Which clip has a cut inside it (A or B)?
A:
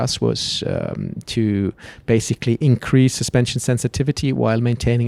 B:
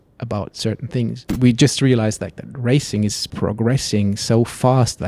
B